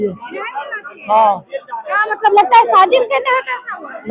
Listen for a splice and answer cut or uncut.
uncut